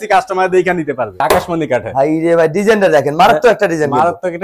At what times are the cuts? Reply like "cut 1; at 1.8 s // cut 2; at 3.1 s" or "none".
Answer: cut 1; at 1.2 s